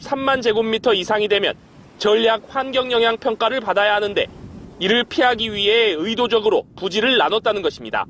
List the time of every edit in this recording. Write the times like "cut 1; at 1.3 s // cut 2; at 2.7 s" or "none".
cut 1; at 2.9 s